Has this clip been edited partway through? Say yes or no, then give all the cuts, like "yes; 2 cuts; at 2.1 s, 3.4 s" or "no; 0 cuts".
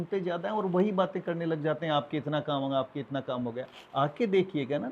no; 0 cuts